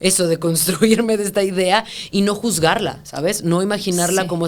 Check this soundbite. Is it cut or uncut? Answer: uncut